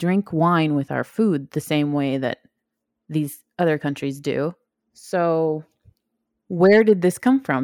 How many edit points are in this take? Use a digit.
1